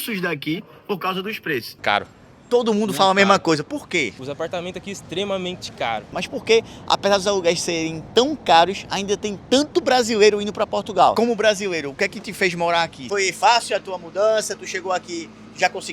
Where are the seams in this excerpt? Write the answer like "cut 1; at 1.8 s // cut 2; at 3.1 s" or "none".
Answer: cut 1; at 1.7 s // cut 2; at 4.2 s // cut 3; at 6.2 s // cut 4; at 11.1 s // cut 5; at 13.0 s